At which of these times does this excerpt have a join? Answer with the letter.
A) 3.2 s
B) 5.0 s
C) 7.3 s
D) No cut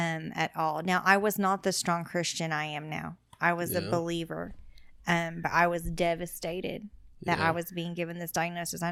D